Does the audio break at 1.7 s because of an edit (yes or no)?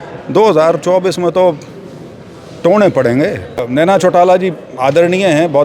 no